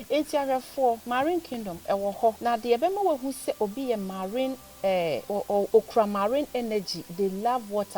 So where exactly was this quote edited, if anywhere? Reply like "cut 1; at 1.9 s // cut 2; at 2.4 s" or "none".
cut 1; at 1.0 s // cut 2; at 2.4 s // cut 3; at 5.2 s